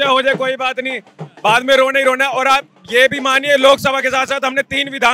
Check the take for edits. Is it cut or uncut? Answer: uncut